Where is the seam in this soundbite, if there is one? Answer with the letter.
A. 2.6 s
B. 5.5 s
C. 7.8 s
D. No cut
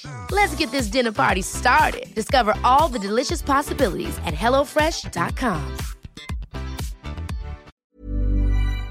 C